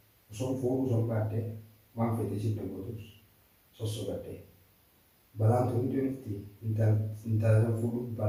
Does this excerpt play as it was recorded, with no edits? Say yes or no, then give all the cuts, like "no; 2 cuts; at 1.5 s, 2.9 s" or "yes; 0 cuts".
yes; 0 cuts